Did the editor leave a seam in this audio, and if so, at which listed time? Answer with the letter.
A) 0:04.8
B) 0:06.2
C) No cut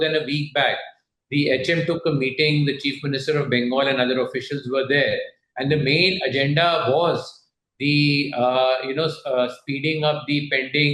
C